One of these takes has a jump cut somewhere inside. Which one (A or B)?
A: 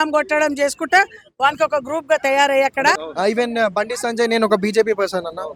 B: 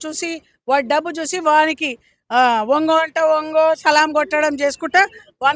A